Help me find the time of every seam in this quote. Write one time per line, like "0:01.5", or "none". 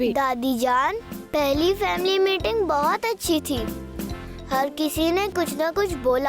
0:01.1